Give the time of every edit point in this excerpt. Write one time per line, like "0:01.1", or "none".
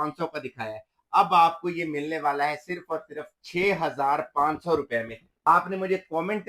0:05.2